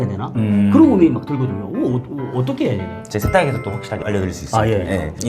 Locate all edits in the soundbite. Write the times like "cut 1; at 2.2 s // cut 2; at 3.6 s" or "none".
cut 1; at 4.0 s

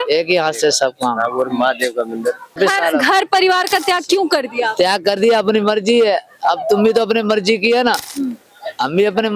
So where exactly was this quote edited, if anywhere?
cut 1; at 2.6 s

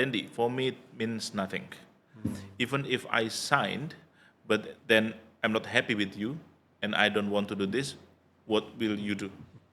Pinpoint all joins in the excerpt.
none

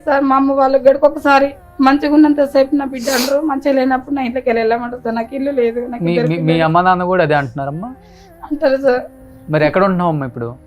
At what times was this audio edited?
none

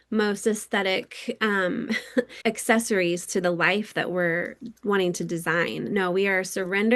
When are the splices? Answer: cut 1; at 2.3 s

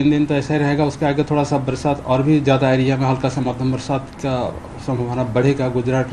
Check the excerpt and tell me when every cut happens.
cut 1; at 4.7 s

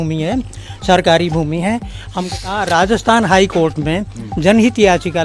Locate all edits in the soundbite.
cut 1; at 2.1 s

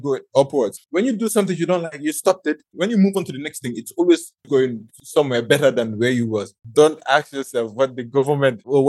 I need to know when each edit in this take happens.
cut 1; at 0.8 s // cut 2; at 6.6 s

